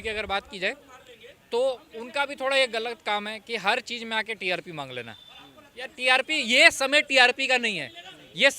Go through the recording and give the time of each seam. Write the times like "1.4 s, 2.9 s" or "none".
none